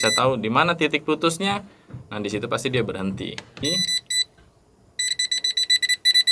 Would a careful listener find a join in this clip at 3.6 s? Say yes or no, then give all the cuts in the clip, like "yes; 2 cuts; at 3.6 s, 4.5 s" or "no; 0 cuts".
yes; 1 cut; at 3.6 s